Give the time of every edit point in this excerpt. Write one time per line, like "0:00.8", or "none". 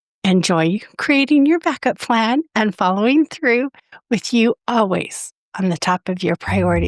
none